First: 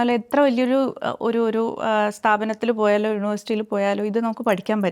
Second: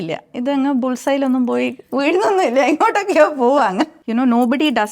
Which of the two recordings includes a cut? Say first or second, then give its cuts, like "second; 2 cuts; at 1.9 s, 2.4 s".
second; 1 cut; at 4.0 s